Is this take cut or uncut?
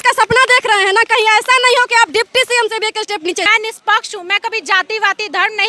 cut